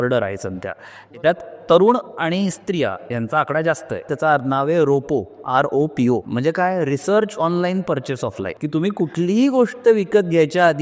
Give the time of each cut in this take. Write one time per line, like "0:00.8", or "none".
0:04.1
0:06.3
0:08.5